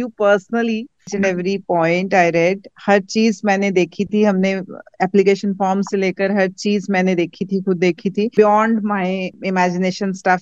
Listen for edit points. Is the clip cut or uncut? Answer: cut